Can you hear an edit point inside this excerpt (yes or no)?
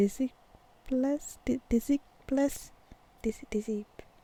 no